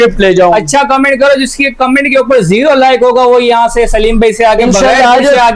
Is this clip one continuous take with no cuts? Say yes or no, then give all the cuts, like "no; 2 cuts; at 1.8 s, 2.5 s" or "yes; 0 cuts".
yes; 0 cuts